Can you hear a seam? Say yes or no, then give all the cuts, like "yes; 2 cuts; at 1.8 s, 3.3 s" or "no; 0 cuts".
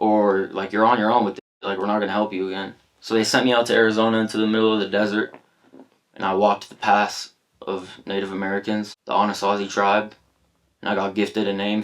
yes; 1 cut; at 9.0 s